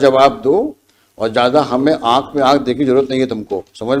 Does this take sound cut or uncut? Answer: uncut